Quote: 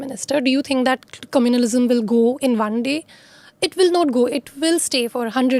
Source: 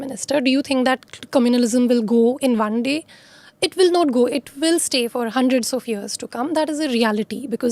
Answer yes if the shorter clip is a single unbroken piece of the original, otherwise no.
yes